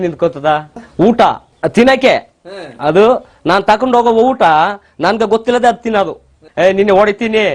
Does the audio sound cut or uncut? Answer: cut